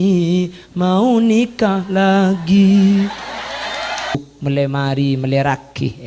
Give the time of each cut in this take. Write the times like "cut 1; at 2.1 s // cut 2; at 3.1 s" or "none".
cut 1; at 4.2 s